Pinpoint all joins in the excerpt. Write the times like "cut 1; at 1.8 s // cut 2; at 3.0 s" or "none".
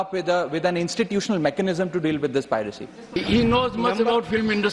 cut 1; at 3.1 s